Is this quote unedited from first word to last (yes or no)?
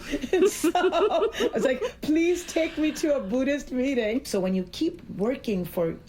no